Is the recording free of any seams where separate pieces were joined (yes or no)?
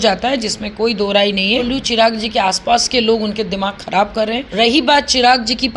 no